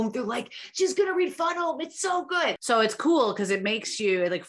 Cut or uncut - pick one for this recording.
cut